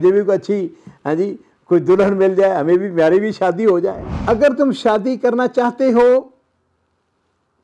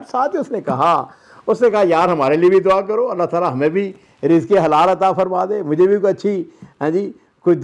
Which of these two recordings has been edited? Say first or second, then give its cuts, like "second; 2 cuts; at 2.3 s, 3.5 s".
first; 1 cut; at 4.1 s